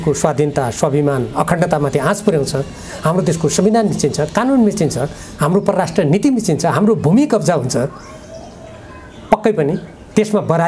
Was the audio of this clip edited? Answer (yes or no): no